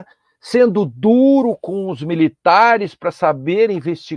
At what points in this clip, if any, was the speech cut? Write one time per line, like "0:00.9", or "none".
none

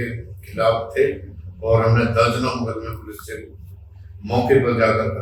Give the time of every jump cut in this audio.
none

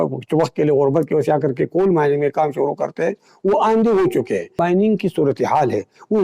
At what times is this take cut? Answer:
0:04.6

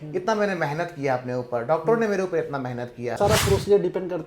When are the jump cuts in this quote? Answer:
0:03.2

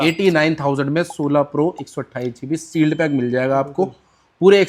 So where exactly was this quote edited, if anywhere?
none

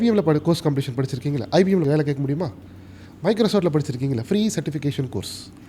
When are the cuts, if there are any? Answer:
0:01.8

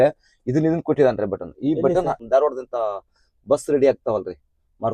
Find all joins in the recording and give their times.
0:02.2

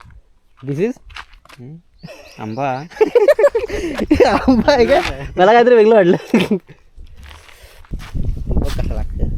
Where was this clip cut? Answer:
0:03.8
0:08.0

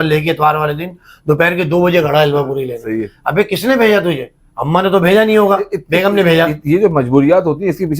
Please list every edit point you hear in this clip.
none

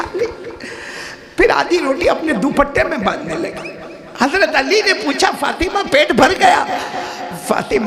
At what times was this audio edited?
none

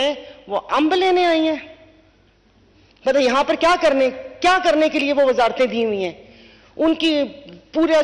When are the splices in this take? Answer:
none

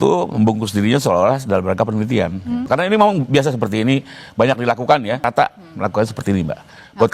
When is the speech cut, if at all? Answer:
0:02.6

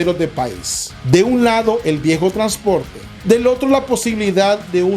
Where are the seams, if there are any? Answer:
0:03.1

